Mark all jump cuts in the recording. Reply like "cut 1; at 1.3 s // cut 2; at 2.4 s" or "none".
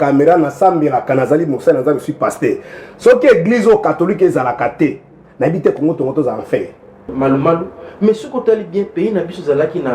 cut 1; at 7.1 s